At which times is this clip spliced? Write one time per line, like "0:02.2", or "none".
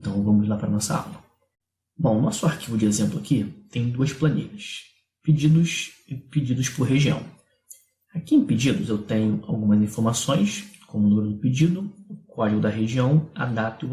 0:06.5